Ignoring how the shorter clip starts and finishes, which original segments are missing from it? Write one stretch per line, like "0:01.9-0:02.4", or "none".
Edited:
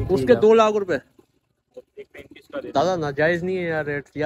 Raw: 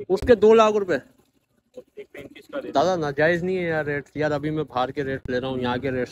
none